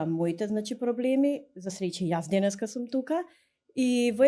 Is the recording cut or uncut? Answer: uncut